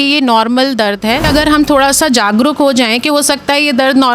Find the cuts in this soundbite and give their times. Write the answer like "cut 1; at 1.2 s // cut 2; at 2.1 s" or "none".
cut 1; at 1.3 s